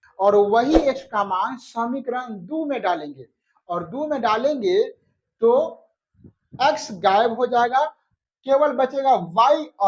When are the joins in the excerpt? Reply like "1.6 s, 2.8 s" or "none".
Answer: none